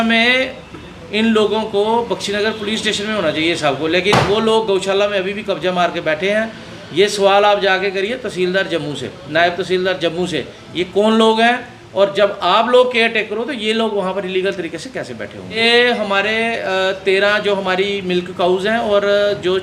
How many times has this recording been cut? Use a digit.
0